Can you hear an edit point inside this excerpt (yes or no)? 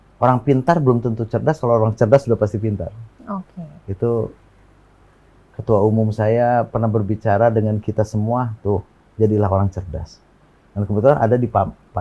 no